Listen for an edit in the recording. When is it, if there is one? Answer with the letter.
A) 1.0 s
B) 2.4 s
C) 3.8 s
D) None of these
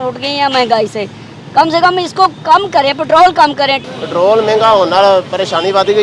C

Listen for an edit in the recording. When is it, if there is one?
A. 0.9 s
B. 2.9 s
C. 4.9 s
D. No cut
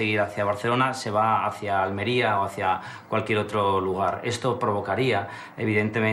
D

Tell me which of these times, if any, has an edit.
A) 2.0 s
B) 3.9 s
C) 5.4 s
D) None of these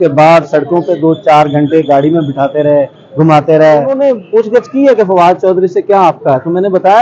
B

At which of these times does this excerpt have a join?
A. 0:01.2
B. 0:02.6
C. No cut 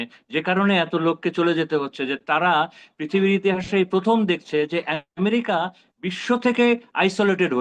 C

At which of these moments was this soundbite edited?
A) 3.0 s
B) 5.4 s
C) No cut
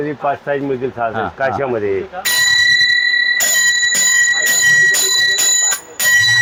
C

